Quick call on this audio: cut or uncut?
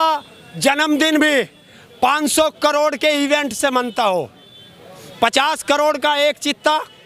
uncut